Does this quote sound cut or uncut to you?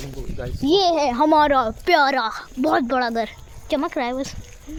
uncut